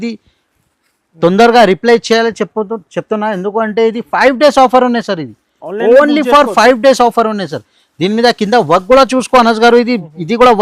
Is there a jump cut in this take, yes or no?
no